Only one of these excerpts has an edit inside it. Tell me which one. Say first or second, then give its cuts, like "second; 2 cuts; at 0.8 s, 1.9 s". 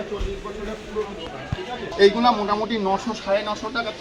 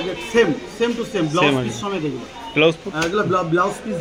first; 1 cut; at 1.8 s